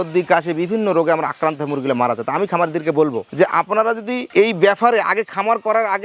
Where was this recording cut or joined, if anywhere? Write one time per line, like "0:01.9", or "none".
none